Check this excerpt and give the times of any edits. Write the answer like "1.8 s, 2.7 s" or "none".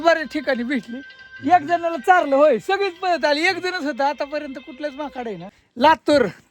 5.6 s